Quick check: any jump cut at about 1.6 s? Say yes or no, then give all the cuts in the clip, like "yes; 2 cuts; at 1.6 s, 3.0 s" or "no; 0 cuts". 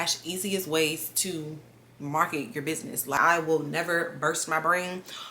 no; 1 cut; at 3.2 s